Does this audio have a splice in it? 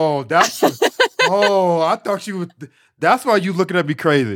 no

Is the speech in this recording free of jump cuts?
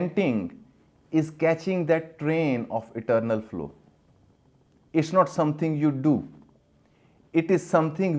yes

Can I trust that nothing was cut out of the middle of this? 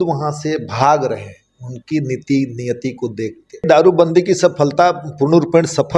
no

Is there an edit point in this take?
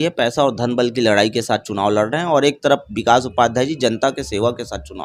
no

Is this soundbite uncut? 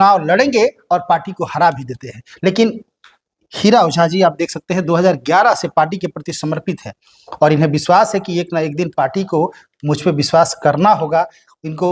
yes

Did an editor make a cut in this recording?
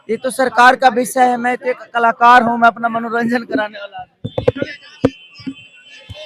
no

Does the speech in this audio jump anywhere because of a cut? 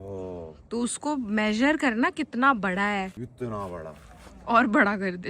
yes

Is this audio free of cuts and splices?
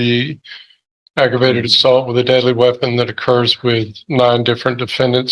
yes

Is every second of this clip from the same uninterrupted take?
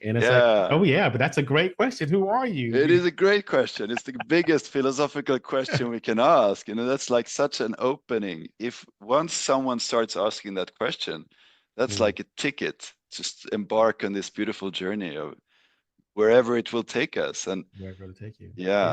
yes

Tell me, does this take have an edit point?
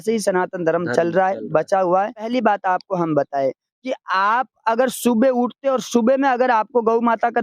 yes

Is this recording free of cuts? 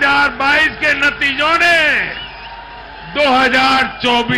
yes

